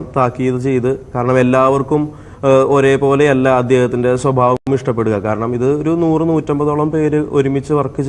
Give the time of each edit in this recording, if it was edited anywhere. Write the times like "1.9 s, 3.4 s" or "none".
1.0 s